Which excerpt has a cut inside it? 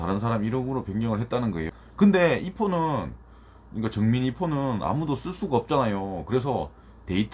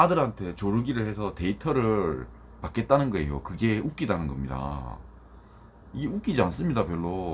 first; 1 cut; at 1.7 s

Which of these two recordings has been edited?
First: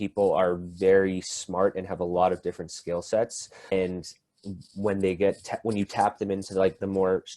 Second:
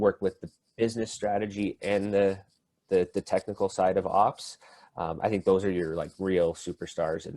first; 1 cut; at 3.7 s

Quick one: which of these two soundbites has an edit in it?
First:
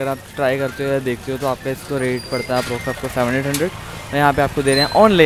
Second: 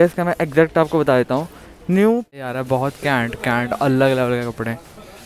second; 1 cut; at 2.3 s

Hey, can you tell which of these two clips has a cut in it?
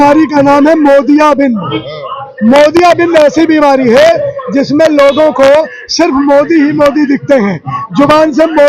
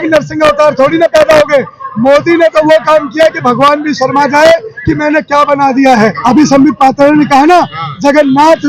second; 1 cut; at 6.2 s

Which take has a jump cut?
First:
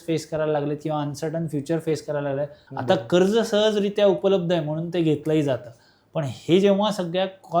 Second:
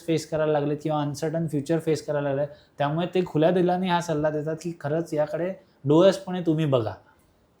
first; 1 cut; at 2.6 s

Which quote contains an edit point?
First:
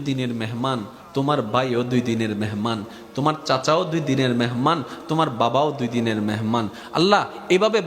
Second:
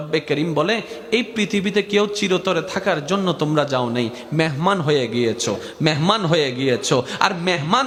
first; 1 cut; at 1.0 s

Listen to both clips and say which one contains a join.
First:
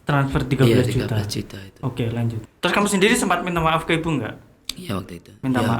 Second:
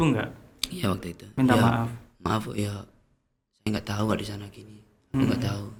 first; 1 cut; at 2.4 s

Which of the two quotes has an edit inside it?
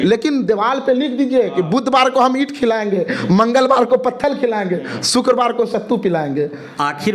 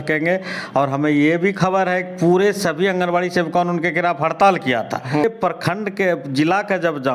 second; 1 cut; at 5.2 s

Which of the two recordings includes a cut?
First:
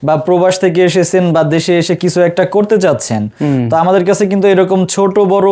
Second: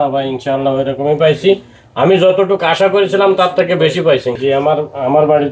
second; 1 cut; at 4.4 s

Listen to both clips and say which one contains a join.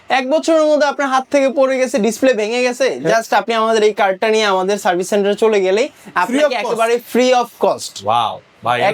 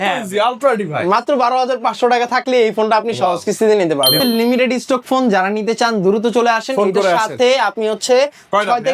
second; 1 cut; at 4.2 s

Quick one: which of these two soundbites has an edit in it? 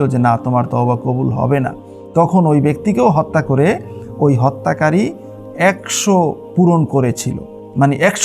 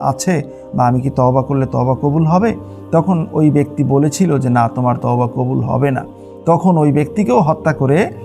first; 1 cut; at 6.4 s

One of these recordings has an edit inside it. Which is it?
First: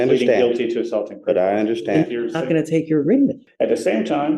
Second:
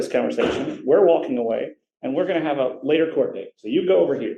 first; 1 cut; at 3.4 s

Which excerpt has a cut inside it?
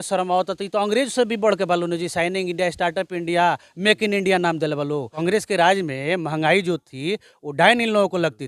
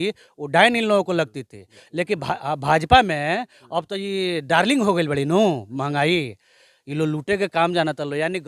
first; 1 cut; at 5.1 s

